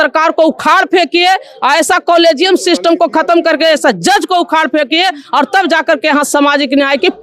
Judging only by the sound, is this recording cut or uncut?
uncut